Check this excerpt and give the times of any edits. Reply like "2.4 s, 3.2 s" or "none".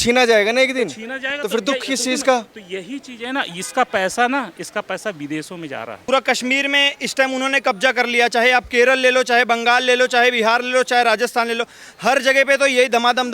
5.9 s